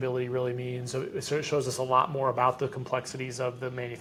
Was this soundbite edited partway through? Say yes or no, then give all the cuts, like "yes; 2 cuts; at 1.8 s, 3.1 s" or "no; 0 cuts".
no; 0 cuts